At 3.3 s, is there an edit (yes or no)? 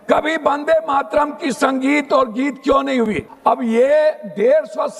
yes